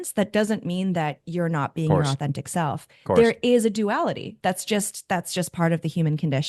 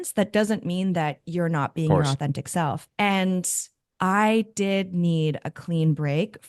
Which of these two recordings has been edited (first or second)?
second